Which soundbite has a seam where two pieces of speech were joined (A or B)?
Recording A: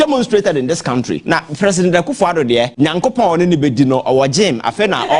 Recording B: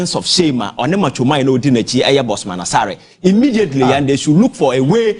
A